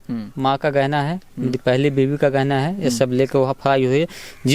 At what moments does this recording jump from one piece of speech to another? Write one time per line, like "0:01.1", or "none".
none